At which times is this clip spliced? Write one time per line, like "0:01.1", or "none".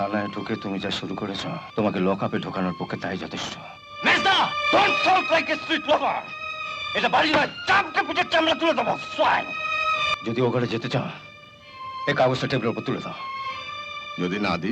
0:01.7
0:10.1